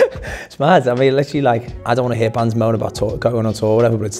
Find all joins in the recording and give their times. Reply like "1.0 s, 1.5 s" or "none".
1.7 s